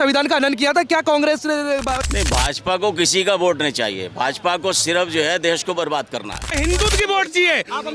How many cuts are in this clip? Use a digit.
2